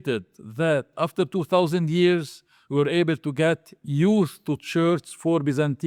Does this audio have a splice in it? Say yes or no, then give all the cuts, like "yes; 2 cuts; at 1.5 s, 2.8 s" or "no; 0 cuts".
no; 0 cuts